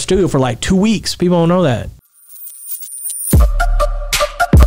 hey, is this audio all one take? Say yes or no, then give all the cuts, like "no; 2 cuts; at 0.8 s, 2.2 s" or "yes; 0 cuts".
no; 1 cut; at 2.1 s